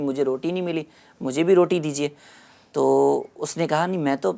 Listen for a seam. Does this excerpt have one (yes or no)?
no